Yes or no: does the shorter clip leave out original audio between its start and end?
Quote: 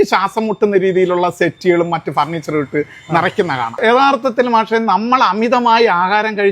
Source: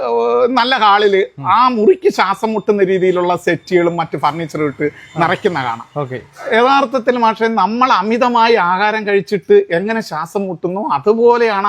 yes